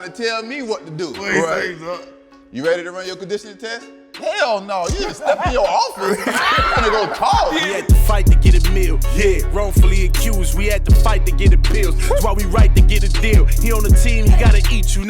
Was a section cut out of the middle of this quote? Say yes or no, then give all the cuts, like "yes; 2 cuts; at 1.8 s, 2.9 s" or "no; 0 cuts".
yes; 1 cut; at 7.6 s